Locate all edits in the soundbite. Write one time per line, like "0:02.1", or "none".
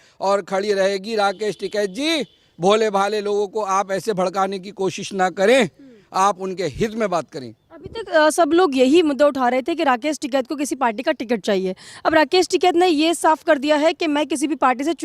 none